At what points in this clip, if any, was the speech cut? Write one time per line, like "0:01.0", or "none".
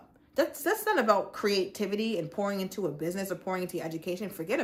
none